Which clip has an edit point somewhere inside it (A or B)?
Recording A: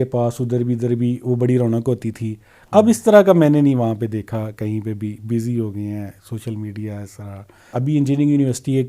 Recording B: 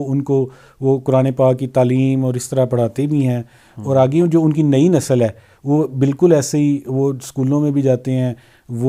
A